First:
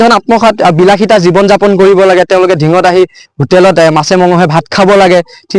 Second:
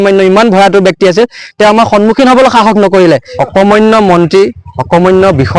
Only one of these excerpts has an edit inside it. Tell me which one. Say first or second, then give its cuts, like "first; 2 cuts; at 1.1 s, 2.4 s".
second; 1 cut; at 3.3 s